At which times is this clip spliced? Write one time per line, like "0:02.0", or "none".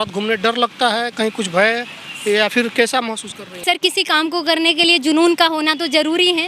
0:03.6